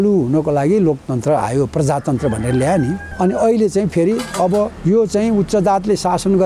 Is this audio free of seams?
no; 2 cuts; at 3.1 s, 4.8 s

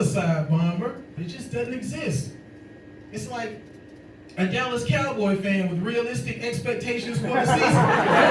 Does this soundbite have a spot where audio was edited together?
yes; 1 cut; at 1.2 s

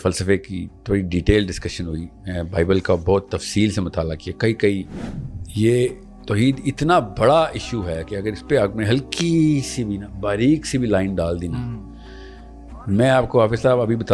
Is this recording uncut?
no; 1 cut; at 5.0 s

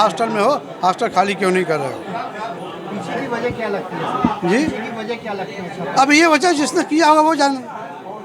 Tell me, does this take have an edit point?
no; 0 cuts

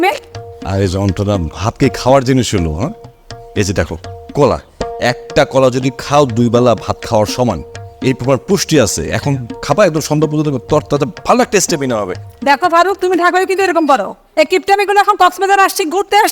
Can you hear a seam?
no; 0 cuts

